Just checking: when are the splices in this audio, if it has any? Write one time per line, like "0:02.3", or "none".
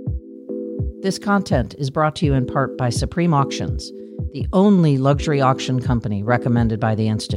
0:01.0